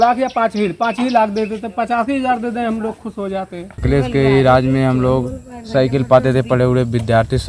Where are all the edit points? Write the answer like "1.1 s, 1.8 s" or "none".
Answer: 3.8 s